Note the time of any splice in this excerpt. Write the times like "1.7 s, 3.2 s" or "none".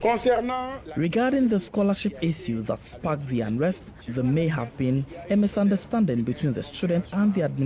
none